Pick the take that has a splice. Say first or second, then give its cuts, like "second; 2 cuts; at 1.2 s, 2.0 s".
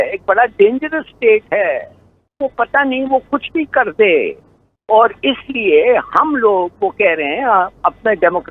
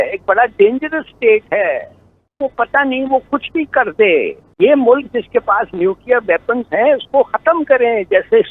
second; 1 cut; at 4.4 s